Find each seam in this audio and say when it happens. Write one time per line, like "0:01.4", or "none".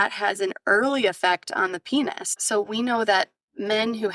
0:02.3